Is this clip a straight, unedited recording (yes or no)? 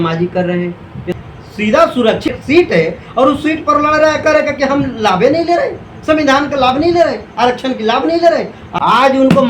no